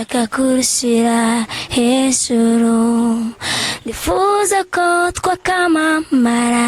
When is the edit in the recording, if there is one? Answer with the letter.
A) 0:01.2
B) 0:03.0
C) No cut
C